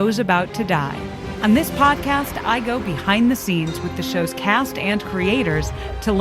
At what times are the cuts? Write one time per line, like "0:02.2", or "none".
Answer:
0:01.2